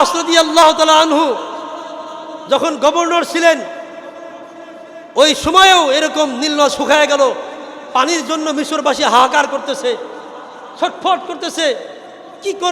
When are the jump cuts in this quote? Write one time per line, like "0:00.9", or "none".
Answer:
none